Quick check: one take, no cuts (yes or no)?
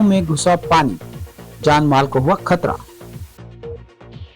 no